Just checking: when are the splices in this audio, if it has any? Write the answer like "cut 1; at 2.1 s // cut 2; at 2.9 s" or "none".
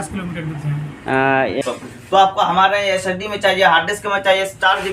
cut 1; at 1.6 s